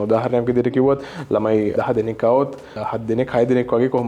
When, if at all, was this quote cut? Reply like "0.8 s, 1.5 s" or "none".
1.7 s